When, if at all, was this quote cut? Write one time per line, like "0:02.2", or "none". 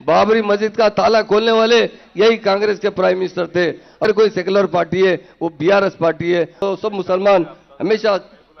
0:04.0
0:06.6